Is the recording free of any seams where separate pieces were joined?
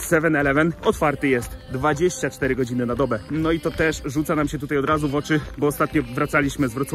yes; 0 cuts

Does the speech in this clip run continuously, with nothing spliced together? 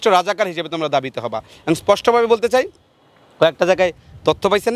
yes; 0 cuts

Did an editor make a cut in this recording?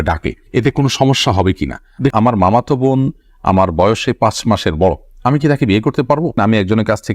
yes; 2 cuts; at 2.1 s, 6.3 s

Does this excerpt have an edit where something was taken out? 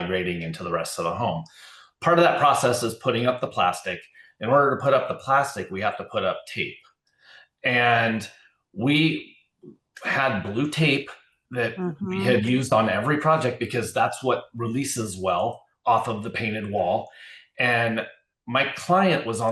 no; 0 cuts

